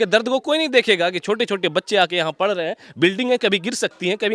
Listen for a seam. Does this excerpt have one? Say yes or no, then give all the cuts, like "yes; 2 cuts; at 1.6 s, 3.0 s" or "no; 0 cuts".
no; 0 cuts